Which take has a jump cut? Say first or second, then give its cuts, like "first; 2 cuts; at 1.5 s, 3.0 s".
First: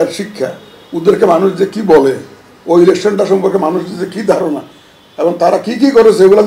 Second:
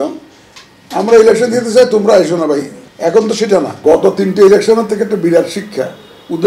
second; 2 cuts; at 2.8 s, 3.8 s